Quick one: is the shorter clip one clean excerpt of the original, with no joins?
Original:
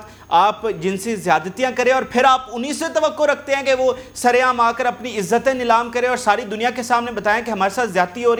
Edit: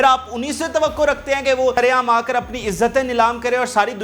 no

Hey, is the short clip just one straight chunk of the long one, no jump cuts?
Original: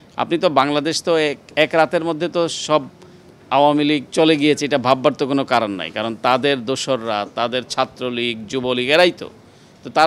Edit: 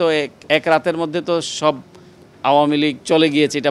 yes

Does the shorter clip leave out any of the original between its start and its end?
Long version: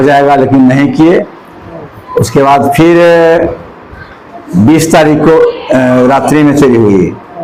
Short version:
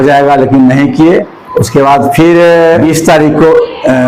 yes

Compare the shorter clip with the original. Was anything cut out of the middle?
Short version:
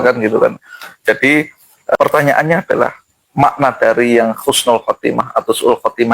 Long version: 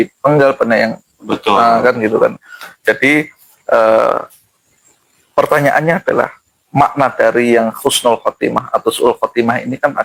yes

